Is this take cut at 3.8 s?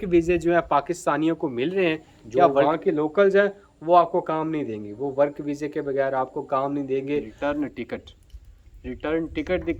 no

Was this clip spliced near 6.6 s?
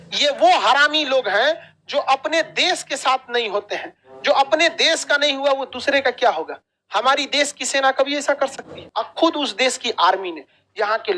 no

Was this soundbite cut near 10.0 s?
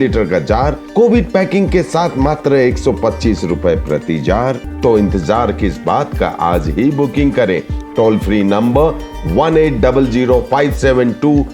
no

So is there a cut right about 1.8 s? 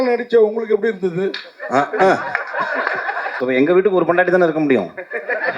no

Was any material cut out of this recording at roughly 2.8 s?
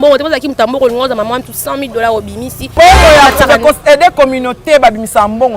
yes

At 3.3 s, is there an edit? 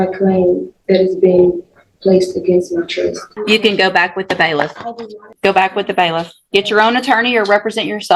yes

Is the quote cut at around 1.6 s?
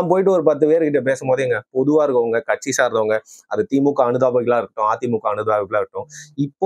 no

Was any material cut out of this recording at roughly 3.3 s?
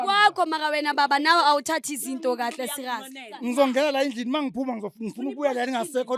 yes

